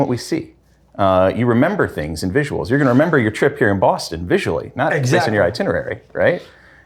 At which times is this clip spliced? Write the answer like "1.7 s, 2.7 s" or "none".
none